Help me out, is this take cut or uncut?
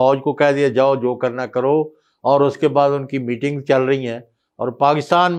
uncut